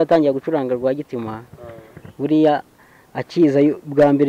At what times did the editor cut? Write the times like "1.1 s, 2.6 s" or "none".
none